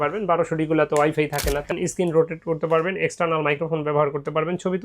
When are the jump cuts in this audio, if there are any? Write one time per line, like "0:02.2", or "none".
0:01.7